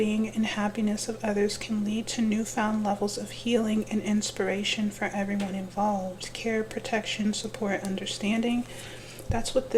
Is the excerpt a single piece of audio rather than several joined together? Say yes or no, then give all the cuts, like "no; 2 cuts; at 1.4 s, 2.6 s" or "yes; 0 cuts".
yes; 0 cuts